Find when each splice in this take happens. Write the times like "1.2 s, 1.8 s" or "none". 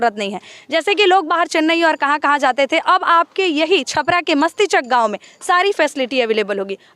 none